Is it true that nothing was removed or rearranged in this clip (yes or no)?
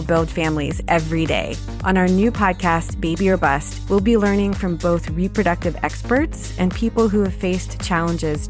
yes